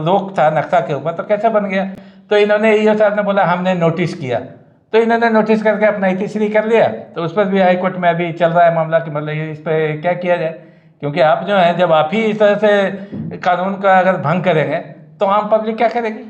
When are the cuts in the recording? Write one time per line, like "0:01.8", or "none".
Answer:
none